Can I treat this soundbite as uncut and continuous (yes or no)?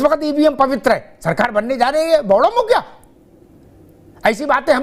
yes